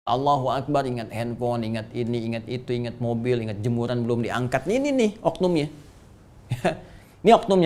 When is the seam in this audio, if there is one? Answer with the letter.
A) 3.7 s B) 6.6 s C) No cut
C